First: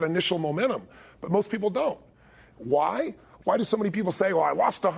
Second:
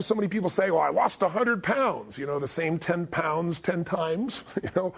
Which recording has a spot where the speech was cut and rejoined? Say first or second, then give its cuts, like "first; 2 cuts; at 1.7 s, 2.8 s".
second; 1 cut; at 3.1 s